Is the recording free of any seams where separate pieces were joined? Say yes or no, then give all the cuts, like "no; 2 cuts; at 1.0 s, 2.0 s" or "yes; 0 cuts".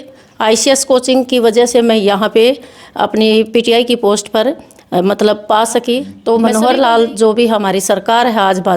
no; 1 cut; at 6.4 s